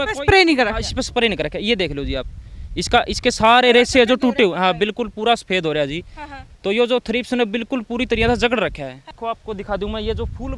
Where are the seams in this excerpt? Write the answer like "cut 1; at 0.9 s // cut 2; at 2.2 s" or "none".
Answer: cut 1; at 9.1 s

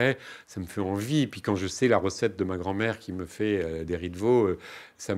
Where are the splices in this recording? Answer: none

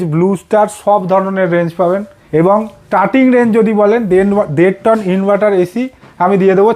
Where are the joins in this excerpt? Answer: cut 1; at 2.2 s // cut 2; at 2.8 s

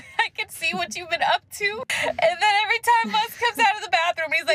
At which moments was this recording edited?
none

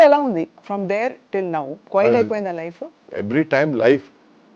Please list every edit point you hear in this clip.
cut 1; at 1.8 s // cut 2; at 2.9 s

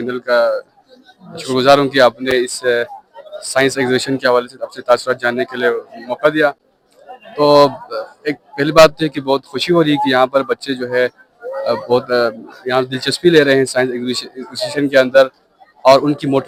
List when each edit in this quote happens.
none

